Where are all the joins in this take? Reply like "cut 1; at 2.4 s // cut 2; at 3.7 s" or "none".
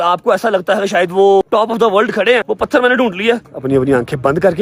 cut 1; at 1.4 s // cut 2; at 2.4 s // cut 3; at 3.5 s